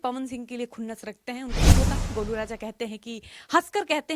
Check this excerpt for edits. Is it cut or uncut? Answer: cut